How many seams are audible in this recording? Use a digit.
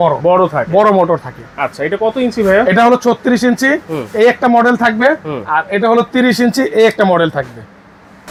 0